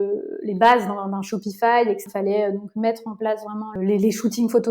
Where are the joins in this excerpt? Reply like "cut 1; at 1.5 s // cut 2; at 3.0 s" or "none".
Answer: cut 1; at 2.1 s // cut 2; at 3.7 s